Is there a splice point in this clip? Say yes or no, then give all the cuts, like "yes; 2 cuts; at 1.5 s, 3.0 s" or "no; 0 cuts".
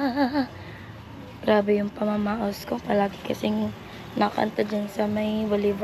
no; 0 cuts